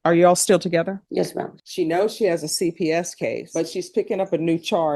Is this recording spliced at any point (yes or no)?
yes